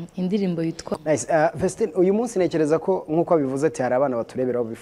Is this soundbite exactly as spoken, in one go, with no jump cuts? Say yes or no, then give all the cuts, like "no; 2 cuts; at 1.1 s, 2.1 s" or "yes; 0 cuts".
no; 1 cut; at 0.9 s